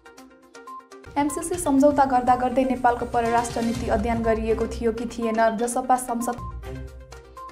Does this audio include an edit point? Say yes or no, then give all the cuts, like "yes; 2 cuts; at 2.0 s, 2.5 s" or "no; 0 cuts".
no; 0 cuts